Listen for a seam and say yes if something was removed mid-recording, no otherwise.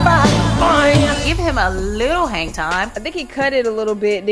yes